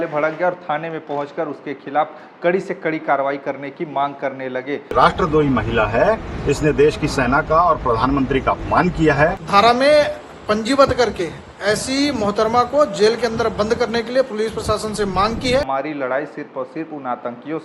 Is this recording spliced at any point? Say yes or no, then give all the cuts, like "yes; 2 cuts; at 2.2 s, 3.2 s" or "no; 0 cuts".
yes; 3 cuts; at 4.9 s, 9.4 s, 15.7 s